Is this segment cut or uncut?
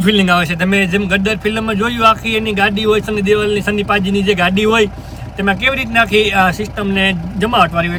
uncut